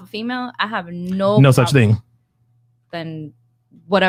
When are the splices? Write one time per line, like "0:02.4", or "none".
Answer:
none

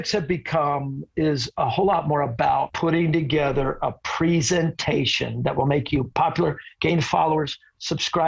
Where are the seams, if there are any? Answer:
0:01.5
0:02.7

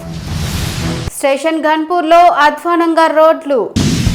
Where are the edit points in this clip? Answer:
0:01.0

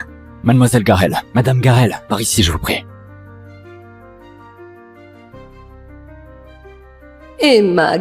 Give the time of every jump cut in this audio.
0:02.9
0:06.9

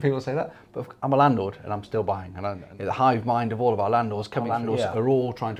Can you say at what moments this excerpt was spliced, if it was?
0:02.7
0:04.5

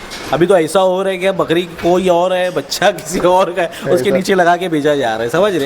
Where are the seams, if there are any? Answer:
none

